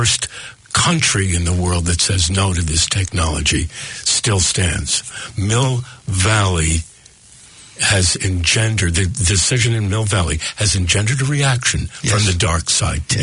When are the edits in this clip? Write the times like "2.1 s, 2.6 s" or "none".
none